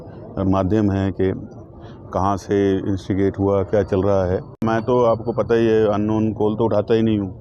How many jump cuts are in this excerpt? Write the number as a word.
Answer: one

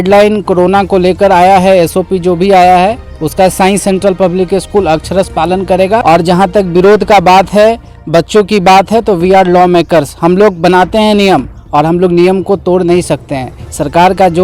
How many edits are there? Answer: one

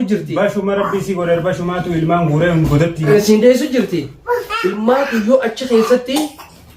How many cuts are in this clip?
one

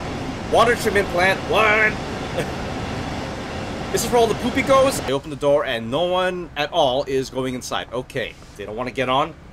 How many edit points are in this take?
two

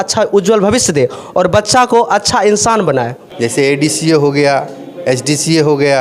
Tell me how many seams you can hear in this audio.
one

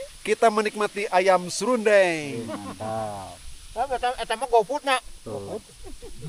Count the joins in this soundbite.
zero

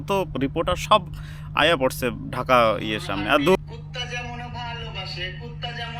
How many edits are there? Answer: one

